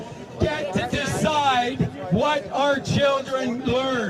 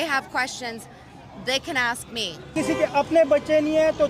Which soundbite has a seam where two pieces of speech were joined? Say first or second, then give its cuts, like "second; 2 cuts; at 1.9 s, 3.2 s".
second; 1 cut; at 2.5 s